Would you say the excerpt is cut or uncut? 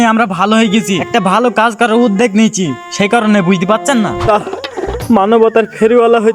cut